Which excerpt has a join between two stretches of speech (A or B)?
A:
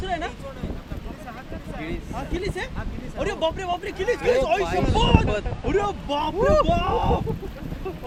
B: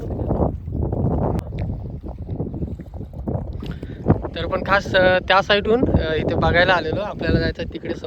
B